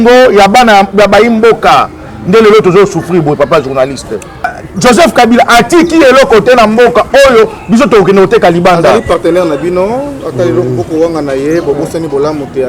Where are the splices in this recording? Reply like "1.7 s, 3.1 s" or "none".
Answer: 4.5 s